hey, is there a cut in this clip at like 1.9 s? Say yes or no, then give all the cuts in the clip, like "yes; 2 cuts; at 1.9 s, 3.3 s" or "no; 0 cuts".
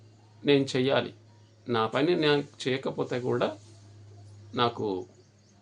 no; 0 cuts